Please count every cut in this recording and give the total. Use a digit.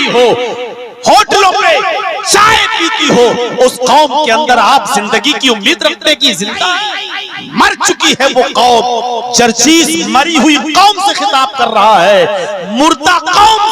1